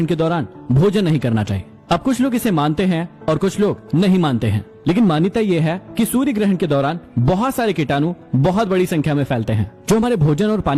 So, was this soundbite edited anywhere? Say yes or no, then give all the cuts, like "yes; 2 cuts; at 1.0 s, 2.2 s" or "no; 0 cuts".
no; 0 cuts